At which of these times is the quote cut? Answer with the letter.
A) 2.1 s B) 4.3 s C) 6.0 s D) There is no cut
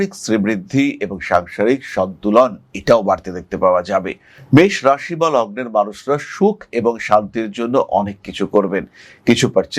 D